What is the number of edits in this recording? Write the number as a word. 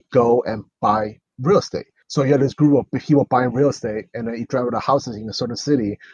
two